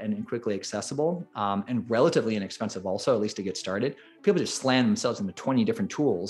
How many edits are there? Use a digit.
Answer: 0